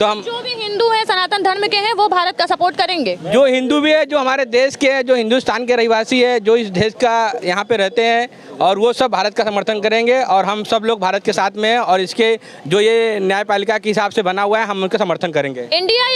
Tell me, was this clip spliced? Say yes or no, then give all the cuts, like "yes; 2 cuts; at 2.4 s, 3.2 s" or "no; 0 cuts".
no; 0 cuts